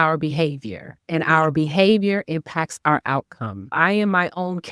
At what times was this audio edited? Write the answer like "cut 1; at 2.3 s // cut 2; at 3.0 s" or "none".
none